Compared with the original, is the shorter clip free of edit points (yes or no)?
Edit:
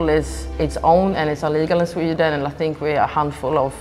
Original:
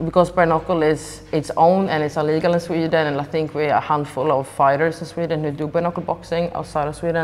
yes